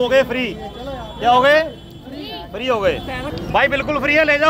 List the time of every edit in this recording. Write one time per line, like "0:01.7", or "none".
0:03.3